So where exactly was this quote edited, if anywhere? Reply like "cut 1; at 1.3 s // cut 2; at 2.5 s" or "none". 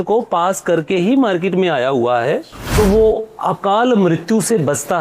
cut 1; at 2.6 s